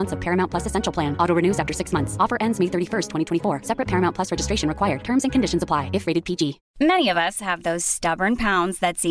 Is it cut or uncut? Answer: cut